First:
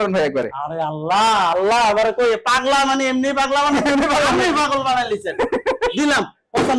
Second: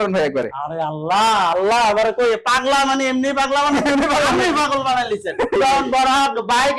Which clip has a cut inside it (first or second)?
second